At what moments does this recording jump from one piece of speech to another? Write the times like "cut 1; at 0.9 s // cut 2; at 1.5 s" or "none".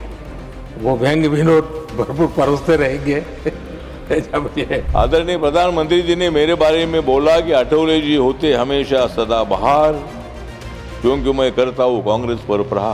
cut 1; at 4.9 s